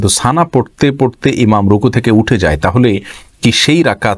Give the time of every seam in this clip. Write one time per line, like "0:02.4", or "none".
none